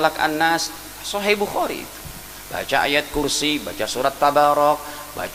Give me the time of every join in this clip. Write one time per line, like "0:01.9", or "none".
none